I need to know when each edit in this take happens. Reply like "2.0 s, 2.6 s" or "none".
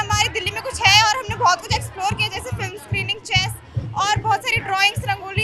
none